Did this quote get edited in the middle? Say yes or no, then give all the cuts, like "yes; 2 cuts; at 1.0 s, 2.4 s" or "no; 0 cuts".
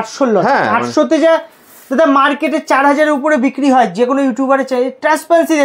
no; 0 cuts